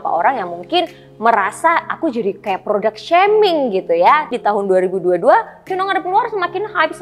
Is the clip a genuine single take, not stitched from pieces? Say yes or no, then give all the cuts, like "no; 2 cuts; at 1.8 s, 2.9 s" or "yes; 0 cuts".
no; 1 cut; at 4.3 s